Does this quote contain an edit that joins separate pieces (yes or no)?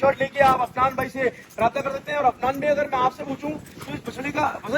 no